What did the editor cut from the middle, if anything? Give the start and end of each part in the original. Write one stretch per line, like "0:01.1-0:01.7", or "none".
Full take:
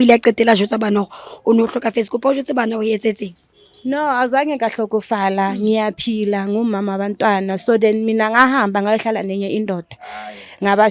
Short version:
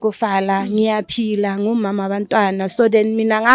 none